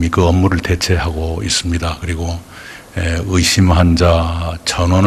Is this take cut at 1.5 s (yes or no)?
yes